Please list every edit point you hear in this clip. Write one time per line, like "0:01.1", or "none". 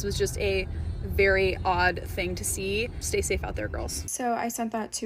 0:03.0
0:04.0

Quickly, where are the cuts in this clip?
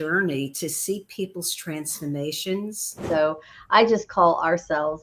0:02.9

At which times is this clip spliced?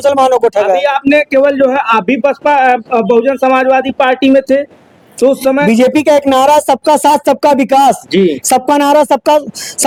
none

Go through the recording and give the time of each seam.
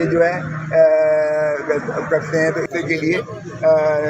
0:02.7

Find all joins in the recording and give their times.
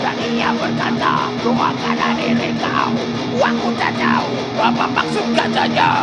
none

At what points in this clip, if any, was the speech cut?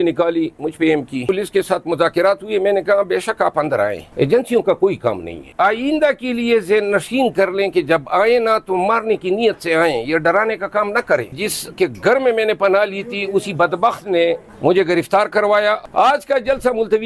0:01.3
0:05.4
0:11.3
0:15.8

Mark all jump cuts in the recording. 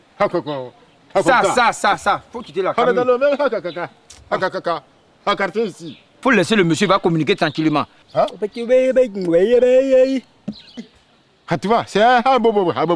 none

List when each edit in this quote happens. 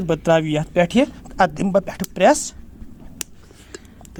none

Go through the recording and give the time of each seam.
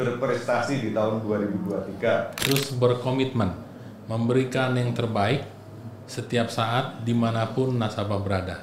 0:02.4

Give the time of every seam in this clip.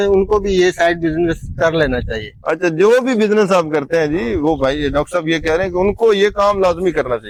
none

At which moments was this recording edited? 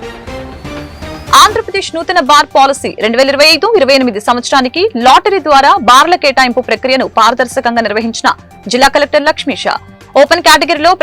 none

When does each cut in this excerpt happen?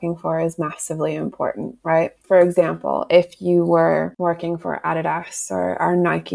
0:02.2
0:04.1

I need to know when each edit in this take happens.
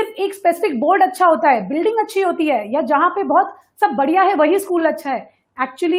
none

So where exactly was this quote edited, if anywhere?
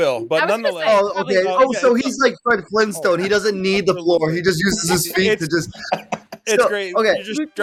none

